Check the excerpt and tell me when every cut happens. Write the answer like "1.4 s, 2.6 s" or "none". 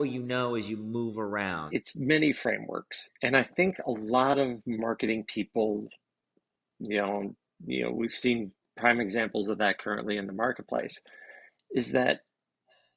1.6 s